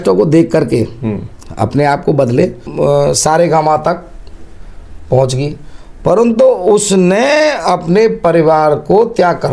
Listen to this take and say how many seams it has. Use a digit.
1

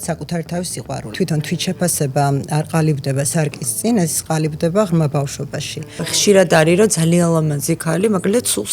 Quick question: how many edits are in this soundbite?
2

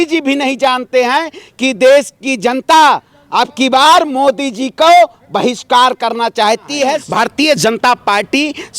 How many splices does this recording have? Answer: 1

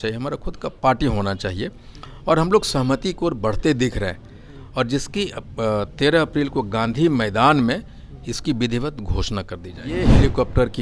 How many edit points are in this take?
1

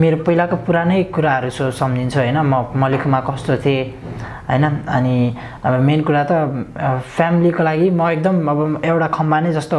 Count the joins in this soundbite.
0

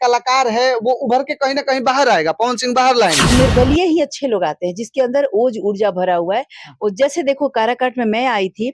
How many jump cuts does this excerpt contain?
1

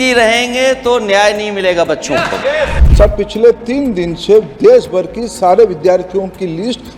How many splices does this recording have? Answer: 1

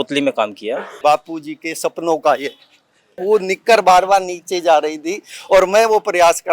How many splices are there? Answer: 2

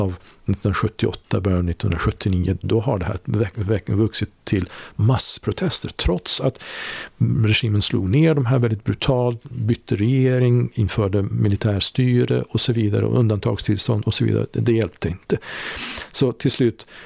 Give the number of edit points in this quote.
1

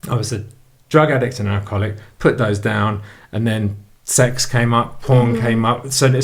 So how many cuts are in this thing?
0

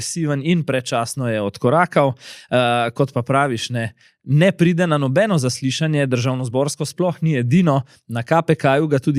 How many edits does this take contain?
0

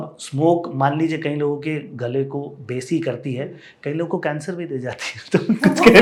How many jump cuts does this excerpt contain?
0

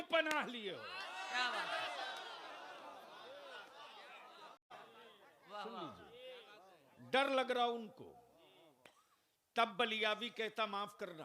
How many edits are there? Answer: 1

